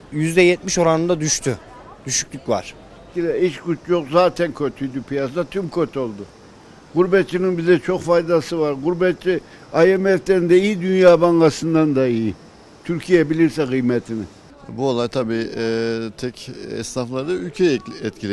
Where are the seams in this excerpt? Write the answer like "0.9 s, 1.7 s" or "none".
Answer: none

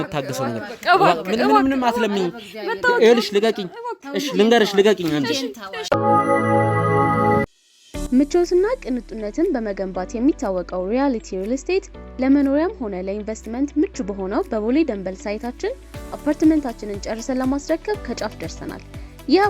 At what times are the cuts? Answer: 5.7 s, 7.5 s

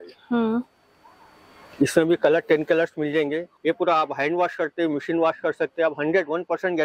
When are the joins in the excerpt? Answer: 3.5 s

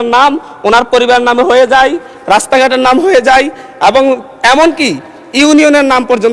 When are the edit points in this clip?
none

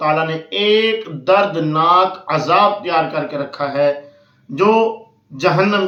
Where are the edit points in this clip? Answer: none

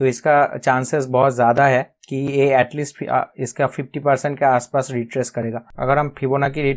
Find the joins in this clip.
5.7 s

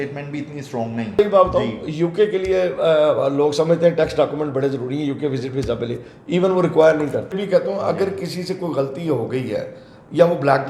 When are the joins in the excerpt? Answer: 1.2 s, 7.3 s

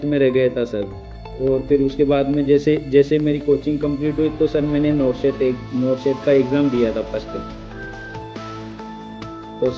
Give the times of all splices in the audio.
1.0 s

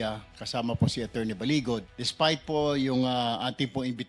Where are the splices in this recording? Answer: 2.0 s

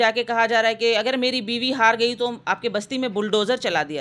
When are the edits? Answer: none

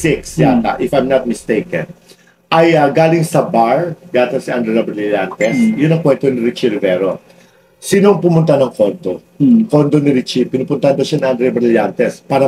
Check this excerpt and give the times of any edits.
none

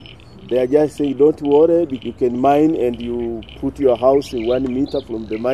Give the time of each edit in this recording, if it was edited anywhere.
2.0 s

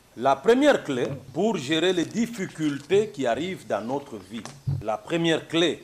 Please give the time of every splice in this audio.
1.2 s, 4.8 s

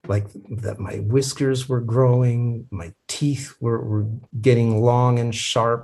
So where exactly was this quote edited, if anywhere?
4.2 s

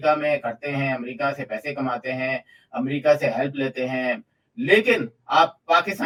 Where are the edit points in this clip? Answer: none

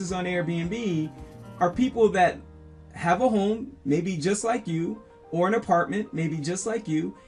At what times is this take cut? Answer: none

